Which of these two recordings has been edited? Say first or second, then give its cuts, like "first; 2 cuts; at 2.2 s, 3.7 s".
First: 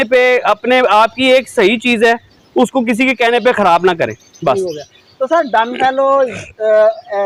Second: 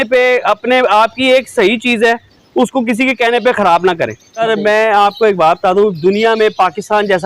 second; 1 cut; at 4.4 s